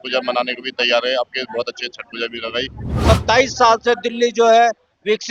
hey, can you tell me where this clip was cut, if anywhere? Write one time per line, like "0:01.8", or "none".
0:02.9